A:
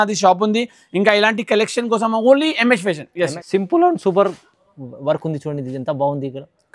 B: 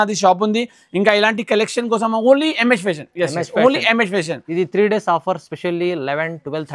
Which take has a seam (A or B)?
A